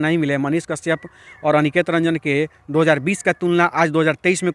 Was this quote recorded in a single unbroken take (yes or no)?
yes